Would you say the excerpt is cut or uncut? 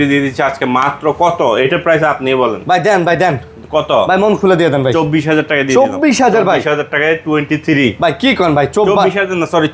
uncut